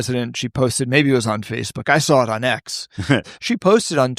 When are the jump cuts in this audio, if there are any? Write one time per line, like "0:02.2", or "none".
0:03.2